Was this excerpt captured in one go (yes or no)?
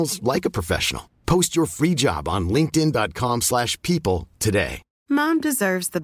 no